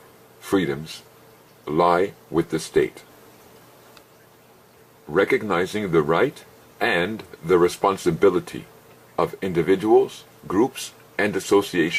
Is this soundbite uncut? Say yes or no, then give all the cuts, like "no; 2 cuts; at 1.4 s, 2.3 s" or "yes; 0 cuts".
yes; 0 cuts